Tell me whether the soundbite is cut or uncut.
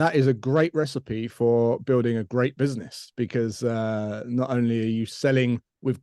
uncut